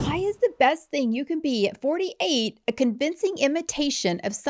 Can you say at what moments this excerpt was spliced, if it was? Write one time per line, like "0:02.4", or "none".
none